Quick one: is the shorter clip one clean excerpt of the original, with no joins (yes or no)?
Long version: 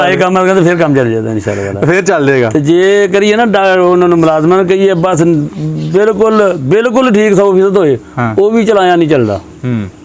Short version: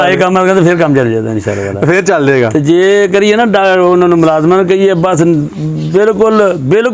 yes